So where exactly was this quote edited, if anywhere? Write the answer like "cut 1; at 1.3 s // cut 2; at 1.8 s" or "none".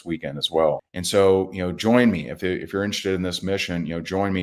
cut 1; at 0.9 s